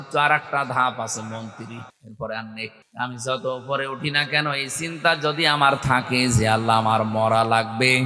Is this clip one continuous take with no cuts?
no; 2 cuts; at 2.0 s, 2.8 s

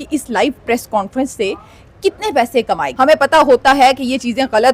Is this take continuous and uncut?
no; 1 cut; at 2.9 s

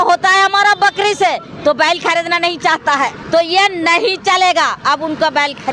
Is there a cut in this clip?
yes; 1 cut; at 3.2 s

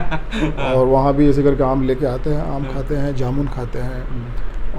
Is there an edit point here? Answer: no; 0 cuts

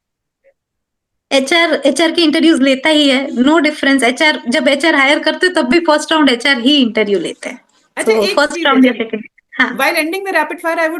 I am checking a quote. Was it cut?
no; 0 cuts

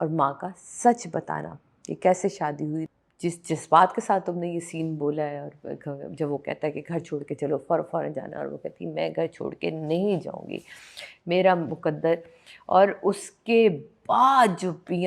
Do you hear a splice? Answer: yes; 1 cut; at 2.9 s

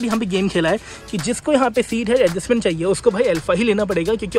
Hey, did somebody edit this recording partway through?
no; 0 cuts

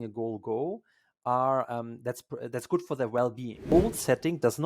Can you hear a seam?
yes; 1 cut; at 3.7 s

